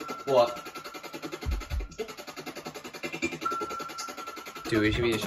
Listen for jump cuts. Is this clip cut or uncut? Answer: uncut